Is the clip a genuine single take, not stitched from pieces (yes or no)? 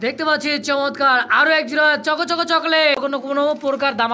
no